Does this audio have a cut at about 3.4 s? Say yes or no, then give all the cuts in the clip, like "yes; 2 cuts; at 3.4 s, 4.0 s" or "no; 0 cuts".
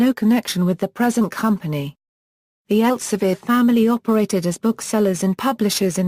yes; 1 cut; at 3.4 s